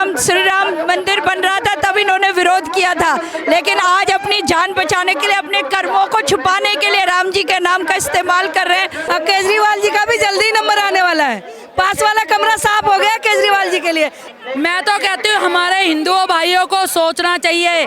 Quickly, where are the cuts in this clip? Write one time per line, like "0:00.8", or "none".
0:09.0
0:14.2